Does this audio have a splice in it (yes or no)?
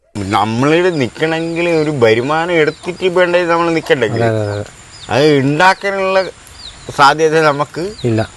no